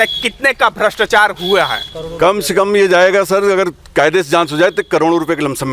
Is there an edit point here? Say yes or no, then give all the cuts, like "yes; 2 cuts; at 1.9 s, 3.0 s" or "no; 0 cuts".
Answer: no; 0 cuts